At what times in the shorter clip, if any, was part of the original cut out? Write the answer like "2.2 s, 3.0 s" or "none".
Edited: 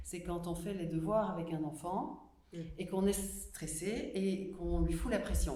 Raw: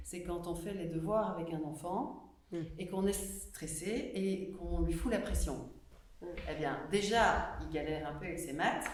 none